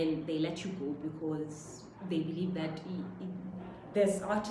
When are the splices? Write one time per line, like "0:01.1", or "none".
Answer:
none